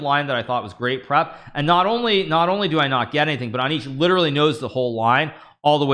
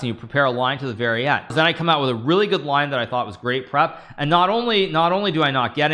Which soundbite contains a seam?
second; 1 cut; at 1.5 s

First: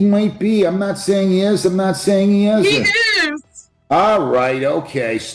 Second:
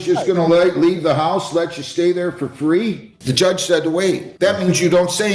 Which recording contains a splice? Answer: second; 2 cuts; at 3.1 s, 4.3 s

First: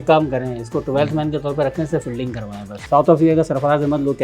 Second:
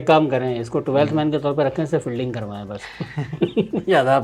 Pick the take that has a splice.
first; 1 cut; at 2.8 s

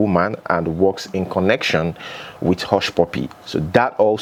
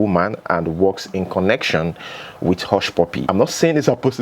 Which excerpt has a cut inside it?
second; 1 cut; at 3.2 s

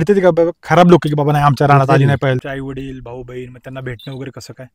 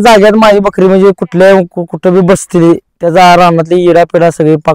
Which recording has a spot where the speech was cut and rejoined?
first; 1 cut; at 2.4 s

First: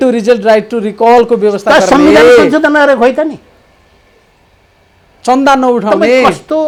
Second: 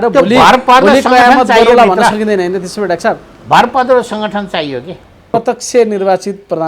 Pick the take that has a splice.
second; 1 cut; at 5.3 s

